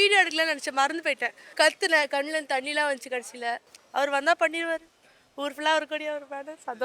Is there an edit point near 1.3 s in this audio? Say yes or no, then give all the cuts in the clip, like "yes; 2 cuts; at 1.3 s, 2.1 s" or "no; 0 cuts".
yes; 2 cuts; at 1.3 s, 3.7 s